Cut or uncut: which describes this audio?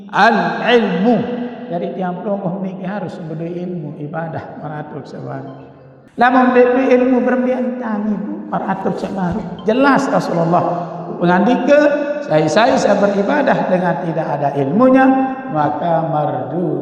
cut